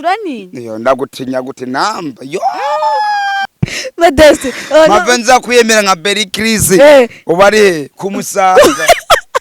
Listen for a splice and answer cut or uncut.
cut